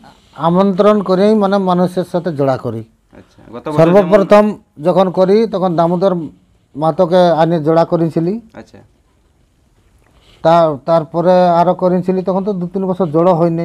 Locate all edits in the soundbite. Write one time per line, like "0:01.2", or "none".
none